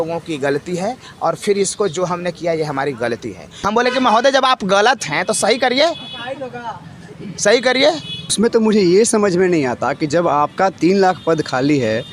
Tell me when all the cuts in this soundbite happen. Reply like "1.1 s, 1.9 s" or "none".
3.5 s, 8.3 s